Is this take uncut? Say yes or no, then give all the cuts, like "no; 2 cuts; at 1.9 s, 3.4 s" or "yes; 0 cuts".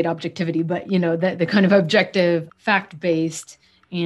no; 1 cut; at 2.5 s